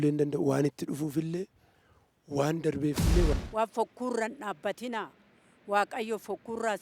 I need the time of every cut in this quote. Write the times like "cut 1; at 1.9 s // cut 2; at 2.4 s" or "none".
cut 1; at 3.3 s

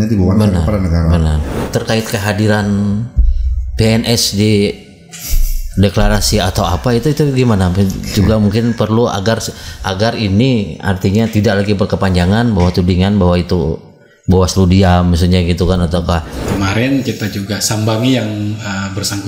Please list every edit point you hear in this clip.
cut 1; at 1.6 s // cut 2; at 16.4 s

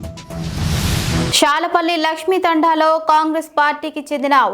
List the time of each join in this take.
cut 1; at 1.3 s

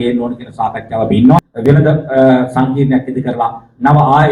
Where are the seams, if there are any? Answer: cut 1; at 1.4 s

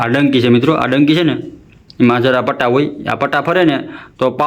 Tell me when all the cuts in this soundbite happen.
none

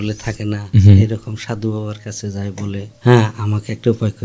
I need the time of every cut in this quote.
cut 1; at 2.9 s

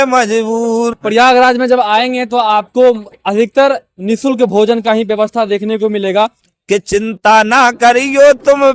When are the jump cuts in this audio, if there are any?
cut 1; at 1.0 s // cut 2; at 6.5 s

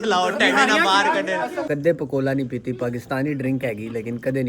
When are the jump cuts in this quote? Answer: cut 1; at 1.7 s

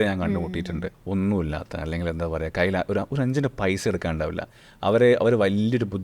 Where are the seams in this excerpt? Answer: cut 1; at 0.9 s

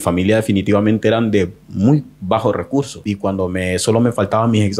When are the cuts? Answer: cut 1; at 3.0 s

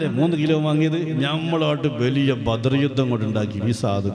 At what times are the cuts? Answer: none

